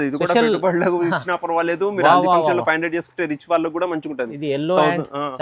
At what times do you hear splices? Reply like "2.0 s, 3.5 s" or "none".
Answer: none